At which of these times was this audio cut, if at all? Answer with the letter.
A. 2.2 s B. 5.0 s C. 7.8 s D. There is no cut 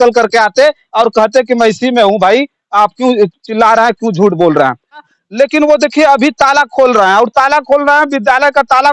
B